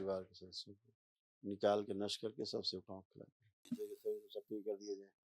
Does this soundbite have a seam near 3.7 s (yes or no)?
yes